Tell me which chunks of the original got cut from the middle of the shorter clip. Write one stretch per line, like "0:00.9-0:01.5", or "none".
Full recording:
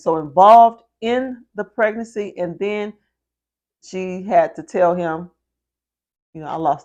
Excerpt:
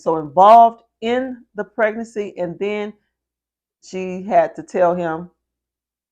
none